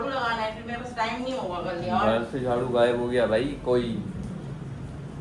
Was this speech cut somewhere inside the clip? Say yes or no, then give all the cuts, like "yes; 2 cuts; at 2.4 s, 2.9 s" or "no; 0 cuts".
no; 0 cuts